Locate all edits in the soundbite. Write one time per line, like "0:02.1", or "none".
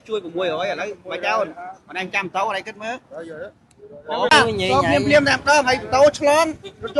0:04.3

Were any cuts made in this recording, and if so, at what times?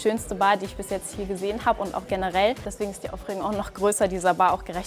0:02.7

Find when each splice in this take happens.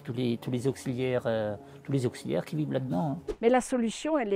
0:03.3

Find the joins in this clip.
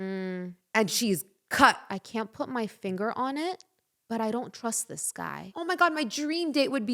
0:01.9
0:05.5

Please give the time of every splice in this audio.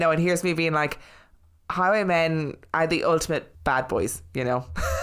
0:03.5

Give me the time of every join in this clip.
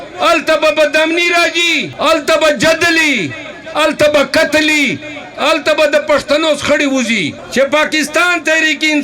0:01.9
0:07.4

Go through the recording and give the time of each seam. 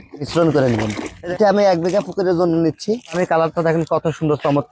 0:01.2

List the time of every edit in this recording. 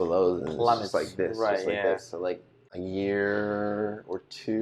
0:02.5

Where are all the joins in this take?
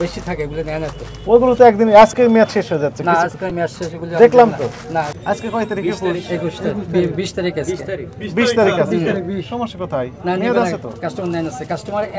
0:05.1

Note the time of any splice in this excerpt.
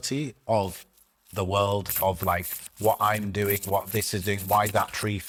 none

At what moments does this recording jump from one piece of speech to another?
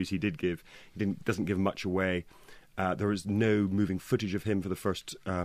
0:04.2

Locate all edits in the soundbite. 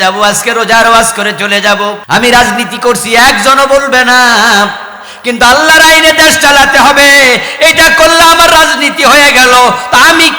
0:02.0

